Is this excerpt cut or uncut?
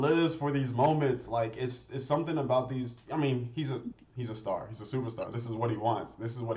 uncut